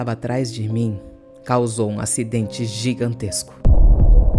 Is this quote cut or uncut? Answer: cut